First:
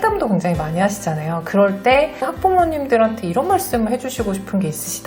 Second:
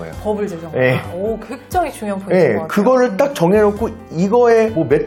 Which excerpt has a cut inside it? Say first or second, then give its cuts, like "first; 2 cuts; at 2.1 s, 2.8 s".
first; 1 cut; at 2.2 s